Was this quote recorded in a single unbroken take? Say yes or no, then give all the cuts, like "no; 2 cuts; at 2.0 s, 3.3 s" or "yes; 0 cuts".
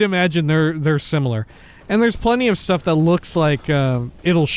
yes; 0 cuts